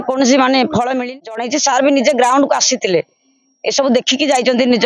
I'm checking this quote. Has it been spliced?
yes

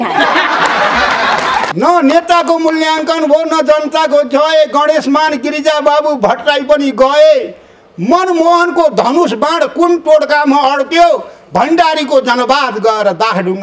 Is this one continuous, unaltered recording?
no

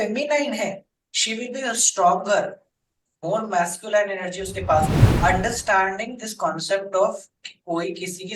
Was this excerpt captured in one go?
no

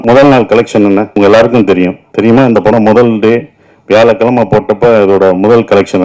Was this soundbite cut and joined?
yes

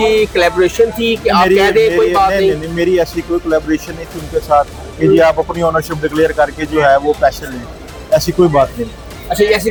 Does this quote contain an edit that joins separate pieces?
no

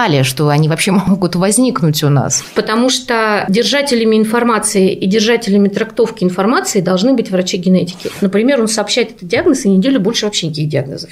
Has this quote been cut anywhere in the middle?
yes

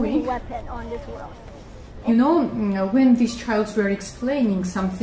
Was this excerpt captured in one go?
no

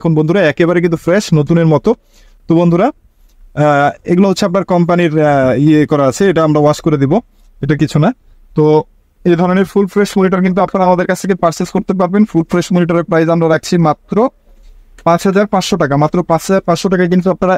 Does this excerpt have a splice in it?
no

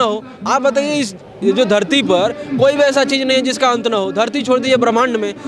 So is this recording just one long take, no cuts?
yes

